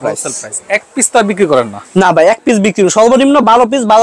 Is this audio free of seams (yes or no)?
yes